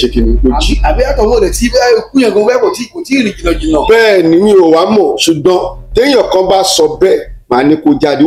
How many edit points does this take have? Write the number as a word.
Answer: zero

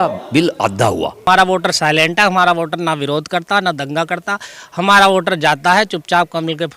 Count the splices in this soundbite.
one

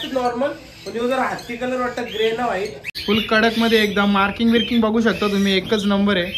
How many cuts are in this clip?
one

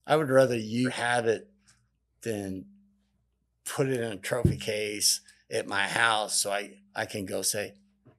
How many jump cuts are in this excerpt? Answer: two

